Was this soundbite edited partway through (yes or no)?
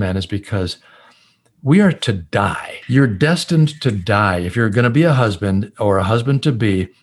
yes